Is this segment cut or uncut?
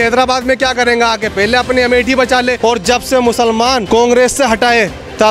cut